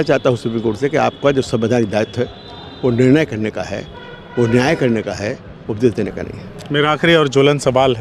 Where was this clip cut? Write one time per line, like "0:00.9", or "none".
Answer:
none